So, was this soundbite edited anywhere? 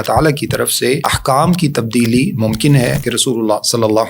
yes; 2 cuts; at 1.1 s, 3.1 s

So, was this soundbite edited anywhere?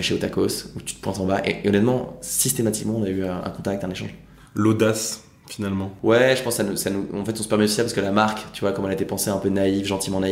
no; 0 cuts

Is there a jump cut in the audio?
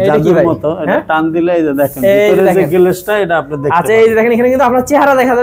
no; 0 cuts

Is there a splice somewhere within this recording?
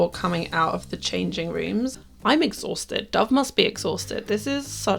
yes; 1 cut; at 2.0 s

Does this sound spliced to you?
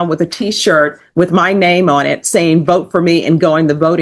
no; 0 cuts

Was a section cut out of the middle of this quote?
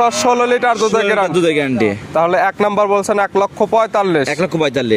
no; 0 cuts

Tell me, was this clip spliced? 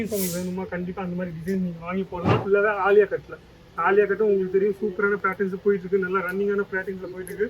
yes; 1 cut; at 2.4 s

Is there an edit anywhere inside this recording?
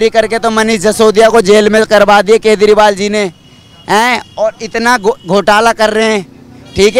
no; 0 cuts

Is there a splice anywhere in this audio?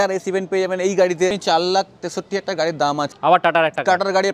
yes; 2 cuts; at 1.4 s, 3.1 s

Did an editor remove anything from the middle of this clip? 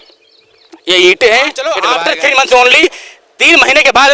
yes; 1 cut; at 1.8 s

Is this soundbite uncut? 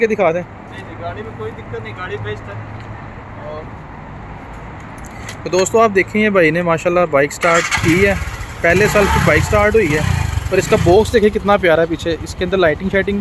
yes; 0 cuts

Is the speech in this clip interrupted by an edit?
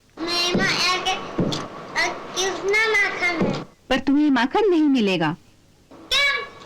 yes; 1 cut; at 3.7 s

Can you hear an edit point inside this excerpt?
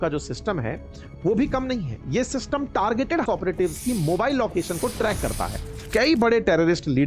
yes; 2 cuts; at 3.2 s, 5.8 s

